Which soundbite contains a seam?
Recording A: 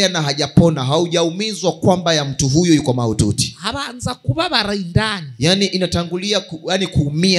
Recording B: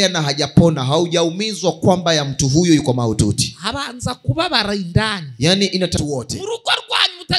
B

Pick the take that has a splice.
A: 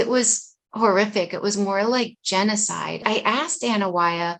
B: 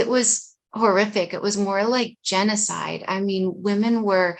A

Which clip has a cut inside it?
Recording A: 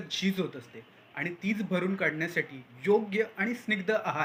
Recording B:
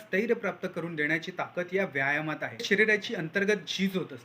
B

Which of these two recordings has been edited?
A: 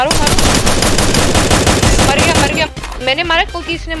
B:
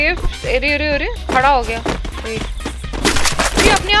A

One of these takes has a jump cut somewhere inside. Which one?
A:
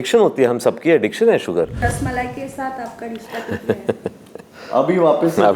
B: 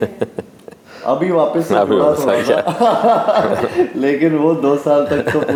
A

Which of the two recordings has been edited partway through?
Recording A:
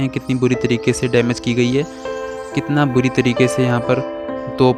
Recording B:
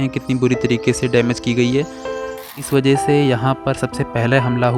B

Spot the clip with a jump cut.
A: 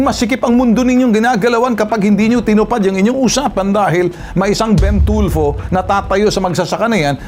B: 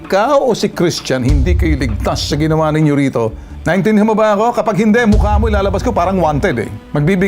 B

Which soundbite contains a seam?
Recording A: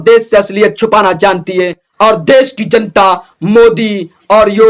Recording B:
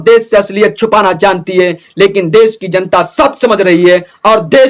A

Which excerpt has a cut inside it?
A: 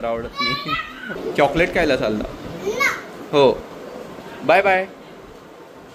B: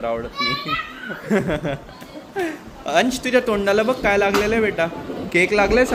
A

